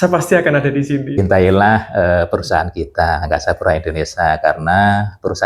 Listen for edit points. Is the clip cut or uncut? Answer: cut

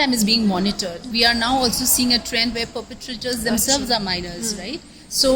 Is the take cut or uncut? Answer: cut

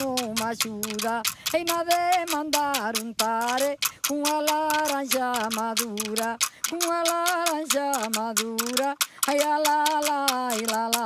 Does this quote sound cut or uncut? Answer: cut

